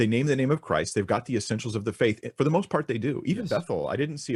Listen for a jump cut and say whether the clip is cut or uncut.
uncut